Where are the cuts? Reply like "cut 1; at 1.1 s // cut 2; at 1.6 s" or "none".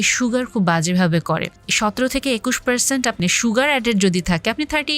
cut 1; at 1.6 s // cut 2; at 3.2 s